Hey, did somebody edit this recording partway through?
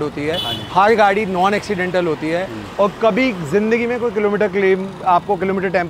no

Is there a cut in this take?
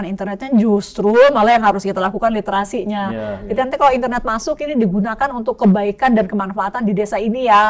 no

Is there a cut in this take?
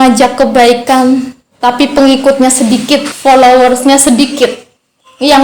yes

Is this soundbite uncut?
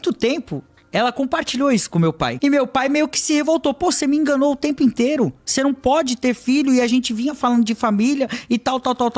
no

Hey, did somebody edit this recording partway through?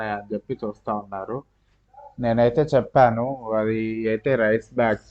no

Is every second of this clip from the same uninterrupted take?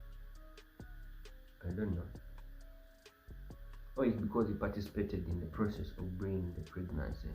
no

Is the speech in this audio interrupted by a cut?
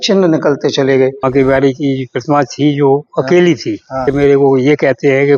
yes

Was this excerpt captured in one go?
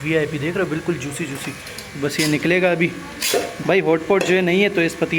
yes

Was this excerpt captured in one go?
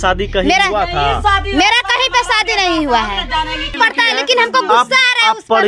no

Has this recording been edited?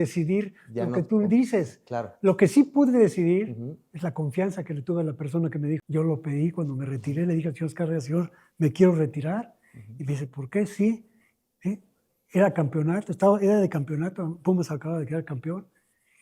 yes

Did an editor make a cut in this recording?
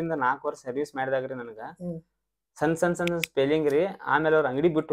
no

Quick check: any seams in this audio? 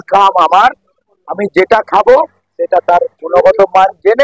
no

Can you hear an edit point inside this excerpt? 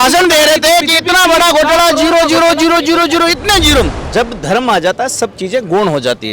yes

